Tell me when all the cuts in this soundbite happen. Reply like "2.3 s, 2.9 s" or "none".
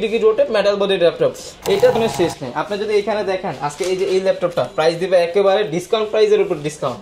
2.0 s

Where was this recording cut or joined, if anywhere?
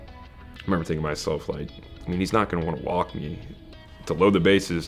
none

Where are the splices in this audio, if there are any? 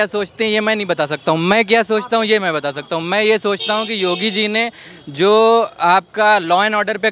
none

